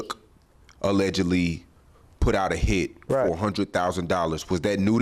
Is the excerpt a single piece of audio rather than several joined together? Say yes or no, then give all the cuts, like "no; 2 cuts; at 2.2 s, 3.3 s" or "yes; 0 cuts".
yes; 0 cuts